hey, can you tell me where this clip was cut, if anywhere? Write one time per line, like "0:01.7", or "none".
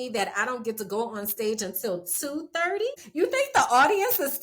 0:03.0